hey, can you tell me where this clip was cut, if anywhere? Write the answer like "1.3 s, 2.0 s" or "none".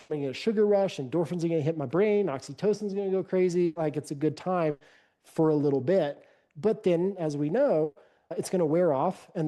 8.3 s